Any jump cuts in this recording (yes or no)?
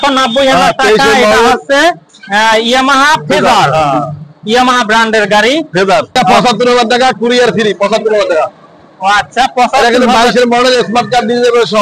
yes